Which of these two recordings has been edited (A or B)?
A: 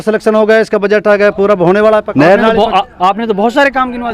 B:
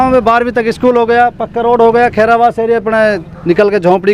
A